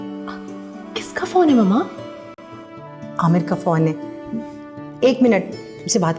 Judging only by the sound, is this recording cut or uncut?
uncut